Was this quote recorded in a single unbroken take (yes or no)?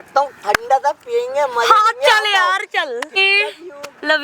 no